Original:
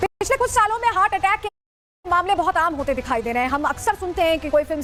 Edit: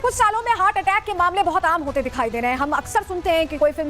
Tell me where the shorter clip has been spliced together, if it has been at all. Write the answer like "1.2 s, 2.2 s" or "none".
1.1 s